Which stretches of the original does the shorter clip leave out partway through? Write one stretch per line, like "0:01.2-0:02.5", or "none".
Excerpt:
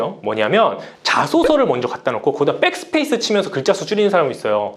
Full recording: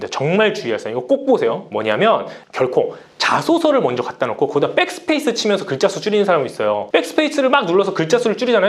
0:02.4-0:03.1